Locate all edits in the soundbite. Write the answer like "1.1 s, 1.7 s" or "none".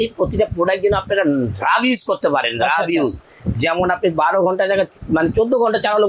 none